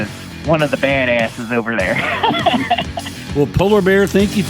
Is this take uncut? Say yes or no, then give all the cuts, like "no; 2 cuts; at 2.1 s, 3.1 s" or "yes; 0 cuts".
yes; 0 cuts